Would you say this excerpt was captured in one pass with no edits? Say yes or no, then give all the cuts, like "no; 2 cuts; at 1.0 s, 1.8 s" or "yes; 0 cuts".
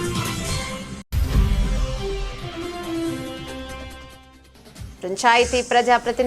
no; 2 cuts; at 1.1 s, 4.9 s